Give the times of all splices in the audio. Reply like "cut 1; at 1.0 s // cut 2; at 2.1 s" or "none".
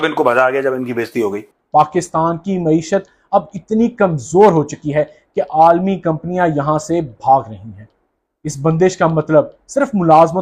cut 1; at 1.5 s